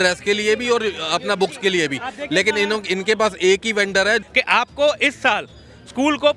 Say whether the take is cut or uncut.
cut